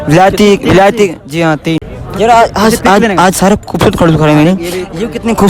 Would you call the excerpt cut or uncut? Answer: cut